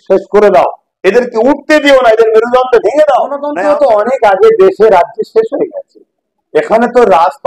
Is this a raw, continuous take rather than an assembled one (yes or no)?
no